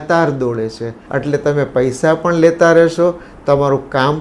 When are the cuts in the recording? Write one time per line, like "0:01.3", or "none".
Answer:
0:00.9